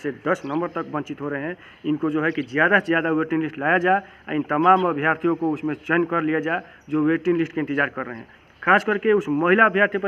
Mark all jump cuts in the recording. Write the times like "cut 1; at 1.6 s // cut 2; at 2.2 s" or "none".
none

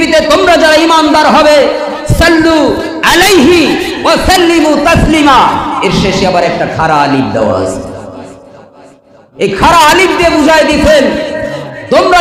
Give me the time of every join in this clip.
none

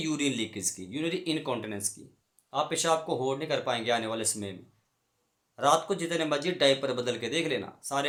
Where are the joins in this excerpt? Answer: none

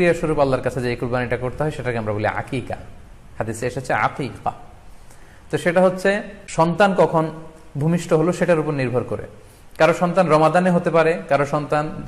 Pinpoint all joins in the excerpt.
cut 1; at 6.4 s

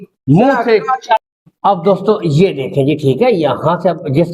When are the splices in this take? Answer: cut 1; at 1.3 s

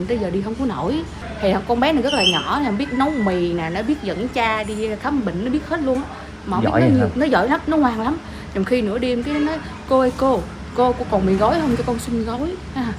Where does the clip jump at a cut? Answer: cut 1; at 1.2 s

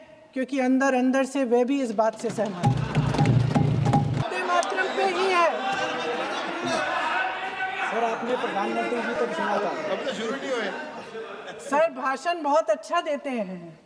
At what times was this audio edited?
cut 1; at 4.2 s

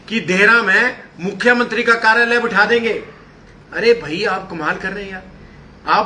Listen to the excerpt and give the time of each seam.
none

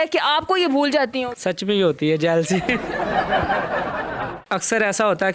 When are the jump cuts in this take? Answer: cut 1; at 1.3 s // cut 2; at 4.0 s

